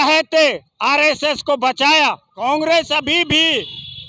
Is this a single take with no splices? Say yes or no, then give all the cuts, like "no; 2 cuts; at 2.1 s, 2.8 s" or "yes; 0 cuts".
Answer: no; 1 cut; at 2.3 s